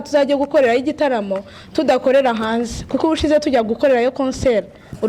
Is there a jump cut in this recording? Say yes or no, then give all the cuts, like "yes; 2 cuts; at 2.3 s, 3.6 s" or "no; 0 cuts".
no; 0 cuts